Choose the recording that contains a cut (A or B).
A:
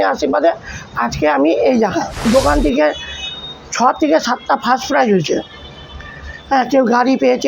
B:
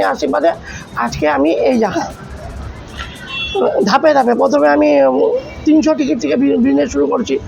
A